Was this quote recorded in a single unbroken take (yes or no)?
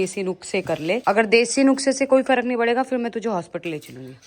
yes